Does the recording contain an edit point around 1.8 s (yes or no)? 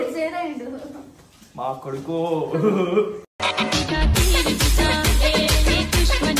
no